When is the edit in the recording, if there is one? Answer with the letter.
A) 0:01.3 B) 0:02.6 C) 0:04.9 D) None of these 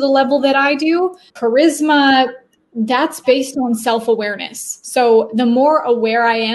A